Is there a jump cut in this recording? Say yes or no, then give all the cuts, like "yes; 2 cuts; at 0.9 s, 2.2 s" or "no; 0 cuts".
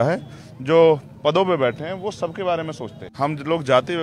yes; 1 cut; at 3.1 s